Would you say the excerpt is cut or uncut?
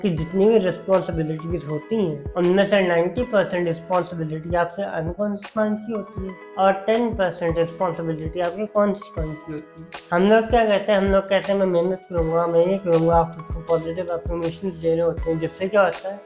uncut